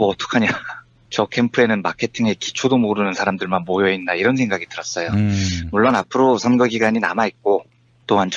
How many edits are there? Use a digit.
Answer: 0